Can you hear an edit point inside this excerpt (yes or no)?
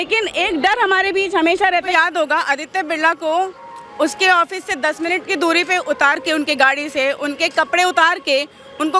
yes